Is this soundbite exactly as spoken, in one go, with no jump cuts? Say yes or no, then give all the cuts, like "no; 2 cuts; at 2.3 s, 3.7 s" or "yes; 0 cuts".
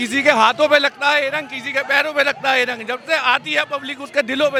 yes; 0 cuts